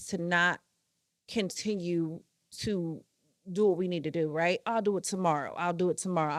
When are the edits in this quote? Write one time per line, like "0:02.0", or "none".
none